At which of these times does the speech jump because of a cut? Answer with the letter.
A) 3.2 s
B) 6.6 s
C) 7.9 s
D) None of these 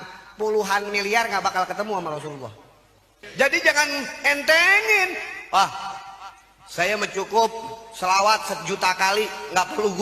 A